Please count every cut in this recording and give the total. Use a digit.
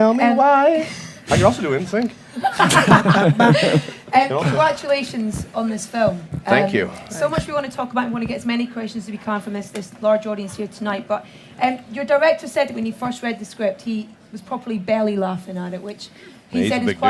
1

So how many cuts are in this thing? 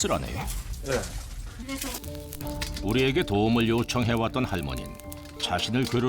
1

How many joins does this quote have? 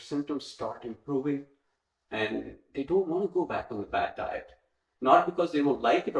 0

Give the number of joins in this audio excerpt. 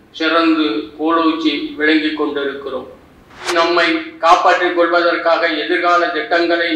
1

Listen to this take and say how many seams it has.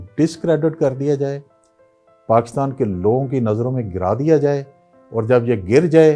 0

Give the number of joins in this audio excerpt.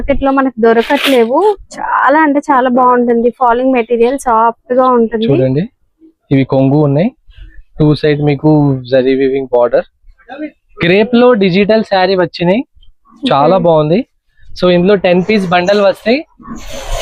0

